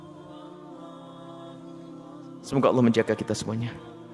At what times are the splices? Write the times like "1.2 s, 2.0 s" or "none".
2.5 s